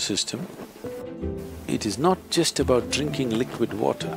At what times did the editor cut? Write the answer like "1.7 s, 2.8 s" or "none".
1.0 s